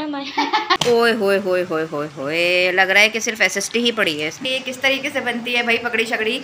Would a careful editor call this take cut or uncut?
cut